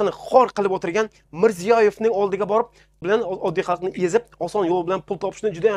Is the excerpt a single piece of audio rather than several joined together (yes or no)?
no